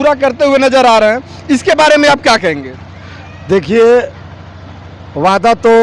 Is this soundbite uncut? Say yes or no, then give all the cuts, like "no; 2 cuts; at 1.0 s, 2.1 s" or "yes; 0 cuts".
yes; 0 cuts